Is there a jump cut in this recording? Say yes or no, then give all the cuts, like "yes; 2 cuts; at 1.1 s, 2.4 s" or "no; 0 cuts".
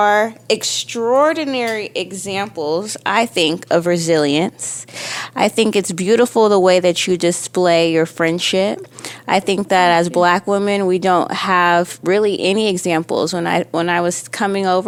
no; 0 cuts